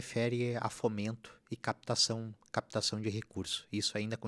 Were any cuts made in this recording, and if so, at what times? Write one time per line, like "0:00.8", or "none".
none